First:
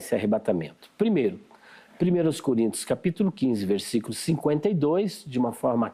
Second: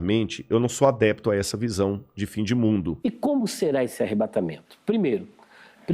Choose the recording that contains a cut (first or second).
second